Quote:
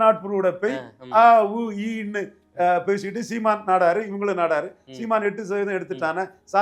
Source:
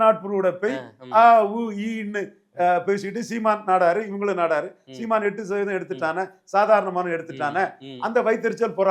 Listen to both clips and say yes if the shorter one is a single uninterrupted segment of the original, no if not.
yes